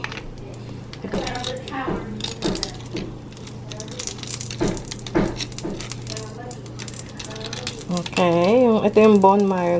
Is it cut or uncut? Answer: cut